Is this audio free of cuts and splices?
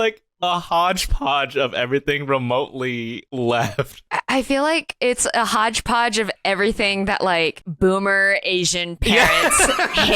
no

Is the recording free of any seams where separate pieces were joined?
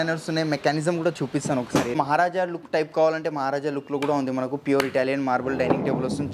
no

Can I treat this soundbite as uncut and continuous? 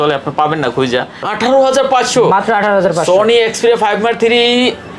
no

